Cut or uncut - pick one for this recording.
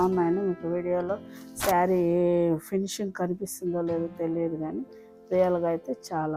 uncut